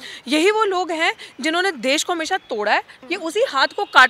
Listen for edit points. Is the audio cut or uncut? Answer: cut